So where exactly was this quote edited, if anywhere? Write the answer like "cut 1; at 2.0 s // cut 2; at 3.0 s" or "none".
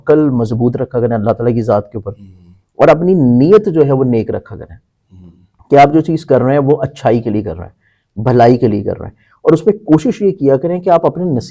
none